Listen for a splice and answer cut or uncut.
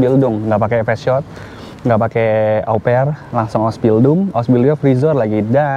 uncut